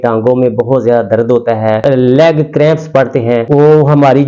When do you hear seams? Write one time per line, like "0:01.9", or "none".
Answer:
0:01.8
0:03.4